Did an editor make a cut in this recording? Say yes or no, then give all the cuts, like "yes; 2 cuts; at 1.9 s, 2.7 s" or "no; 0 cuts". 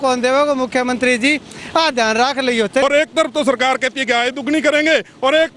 yes; 1 cut; at 2.8 s